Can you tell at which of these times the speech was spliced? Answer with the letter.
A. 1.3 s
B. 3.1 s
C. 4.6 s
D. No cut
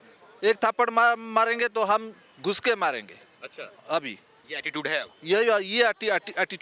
D